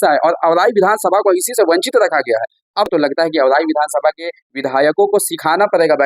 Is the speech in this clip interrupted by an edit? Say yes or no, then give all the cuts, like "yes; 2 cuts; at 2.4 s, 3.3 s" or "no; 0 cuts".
yes; 1 cut; at 2.9 s